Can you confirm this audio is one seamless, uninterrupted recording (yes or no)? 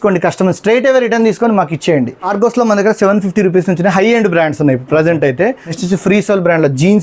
no